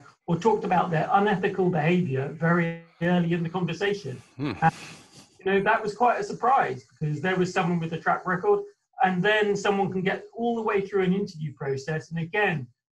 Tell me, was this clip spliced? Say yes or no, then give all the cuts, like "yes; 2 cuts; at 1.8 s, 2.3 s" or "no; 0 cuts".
no; 0 cuts